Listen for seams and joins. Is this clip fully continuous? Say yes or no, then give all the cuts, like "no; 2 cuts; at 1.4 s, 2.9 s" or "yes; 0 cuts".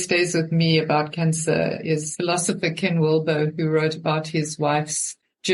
yes; 0 cuts